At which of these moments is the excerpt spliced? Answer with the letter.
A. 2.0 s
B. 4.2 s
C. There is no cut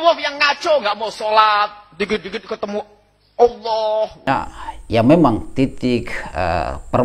B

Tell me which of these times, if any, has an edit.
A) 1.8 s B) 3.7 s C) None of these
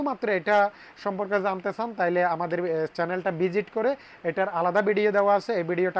C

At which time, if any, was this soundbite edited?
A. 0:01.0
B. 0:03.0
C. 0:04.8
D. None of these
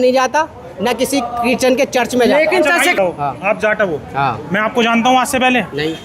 B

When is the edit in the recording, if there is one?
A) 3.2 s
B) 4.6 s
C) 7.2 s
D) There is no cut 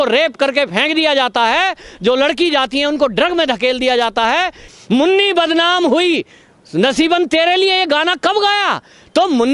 B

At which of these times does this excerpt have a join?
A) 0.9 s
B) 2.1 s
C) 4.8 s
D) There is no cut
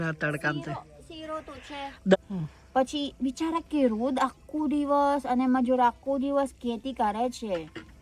B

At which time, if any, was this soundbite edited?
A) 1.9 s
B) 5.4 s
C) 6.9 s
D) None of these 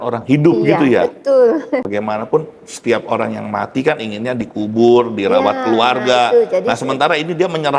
A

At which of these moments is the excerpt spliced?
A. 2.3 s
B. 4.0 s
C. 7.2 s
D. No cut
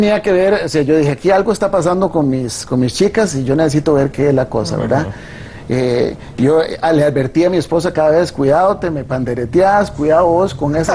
A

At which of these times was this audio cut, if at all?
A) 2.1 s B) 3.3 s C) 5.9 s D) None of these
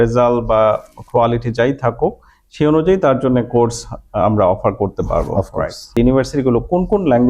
C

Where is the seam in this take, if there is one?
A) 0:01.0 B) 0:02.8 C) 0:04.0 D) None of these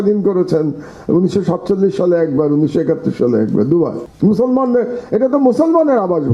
C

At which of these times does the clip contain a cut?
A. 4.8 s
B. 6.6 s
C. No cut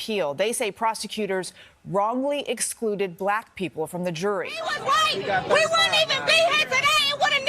A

